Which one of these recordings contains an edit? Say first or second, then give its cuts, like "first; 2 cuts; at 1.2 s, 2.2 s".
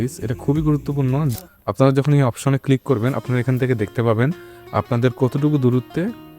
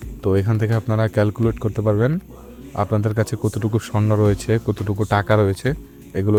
first; 1 cut; at 1.3 s